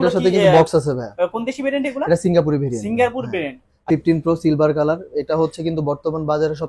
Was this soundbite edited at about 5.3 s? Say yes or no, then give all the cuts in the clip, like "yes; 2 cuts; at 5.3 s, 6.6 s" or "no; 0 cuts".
no; 1 cut; at 3.8 s